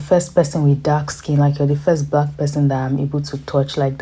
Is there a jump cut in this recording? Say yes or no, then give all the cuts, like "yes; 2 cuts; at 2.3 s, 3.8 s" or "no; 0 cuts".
no; 0 cuts